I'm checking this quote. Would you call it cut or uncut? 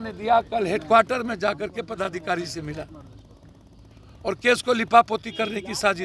uncut